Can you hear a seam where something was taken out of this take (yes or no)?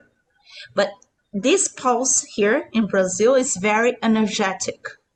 no